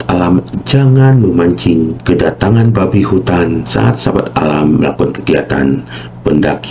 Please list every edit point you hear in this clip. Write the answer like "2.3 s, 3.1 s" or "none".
2.0 s, 3.7 s